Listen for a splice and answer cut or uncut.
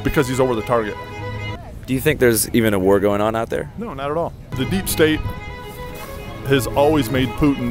cut